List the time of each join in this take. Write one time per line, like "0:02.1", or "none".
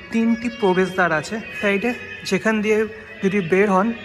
0:01.6

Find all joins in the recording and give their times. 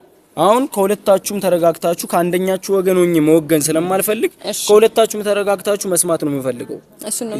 none

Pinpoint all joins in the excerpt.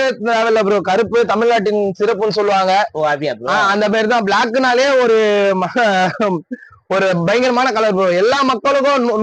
none

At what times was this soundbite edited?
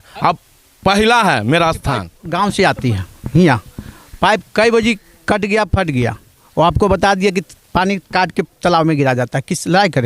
0:01.8

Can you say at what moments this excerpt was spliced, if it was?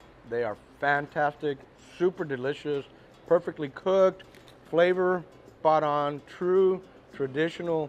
none

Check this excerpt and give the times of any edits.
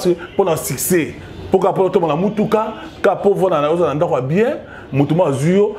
none

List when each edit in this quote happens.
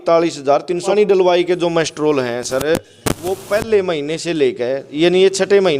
0:00.9

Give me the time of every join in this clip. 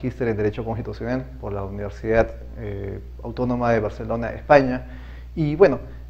0:04.1

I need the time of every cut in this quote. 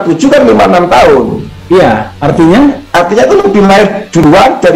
none

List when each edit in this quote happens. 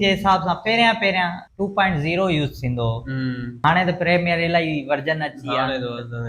0:01.4
0:03.6

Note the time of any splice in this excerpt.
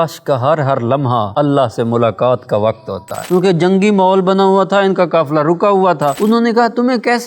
0:01.3
0:03.2
0:06.2

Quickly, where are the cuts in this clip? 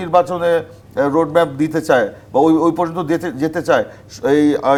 none

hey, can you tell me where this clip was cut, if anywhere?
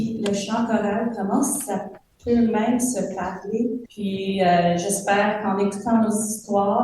0:03.9

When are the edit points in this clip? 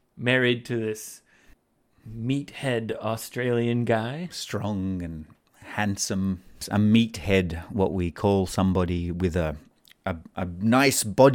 0:06.6

